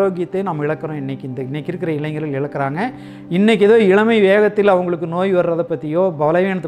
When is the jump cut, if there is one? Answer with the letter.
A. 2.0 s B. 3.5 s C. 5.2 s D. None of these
D